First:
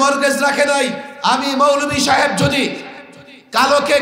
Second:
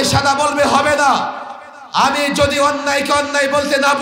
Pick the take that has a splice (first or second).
first